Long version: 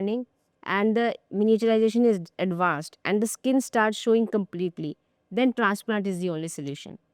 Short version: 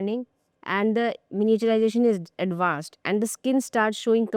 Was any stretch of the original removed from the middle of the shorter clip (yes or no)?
no